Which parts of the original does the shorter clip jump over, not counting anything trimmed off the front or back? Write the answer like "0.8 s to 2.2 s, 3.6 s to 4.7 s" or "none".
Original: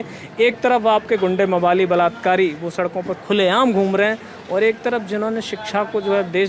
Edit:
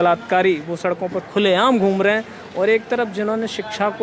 none